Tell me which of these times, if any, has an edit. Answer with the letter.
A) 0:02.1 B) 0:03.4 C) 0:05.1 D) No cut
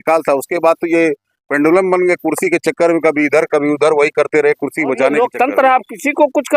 C